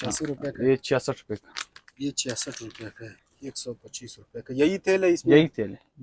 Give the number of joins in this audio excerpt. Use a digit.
1